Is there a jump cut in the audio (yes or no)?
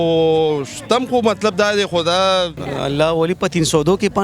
yes